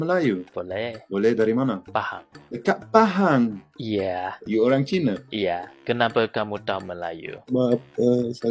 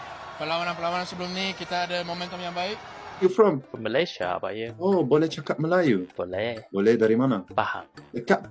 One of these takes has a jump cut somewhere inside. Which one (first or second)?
second